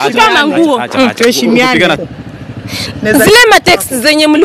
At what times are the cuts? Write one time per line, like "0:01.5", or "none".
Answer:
0:02.0